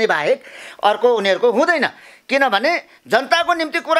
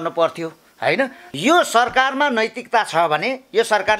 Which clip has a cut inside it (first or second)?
second